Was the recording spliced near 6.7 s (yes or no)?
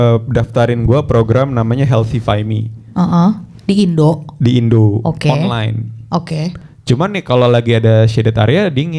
yes